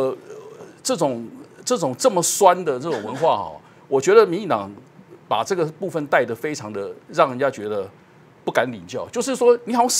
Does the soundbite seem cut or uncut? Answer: uncut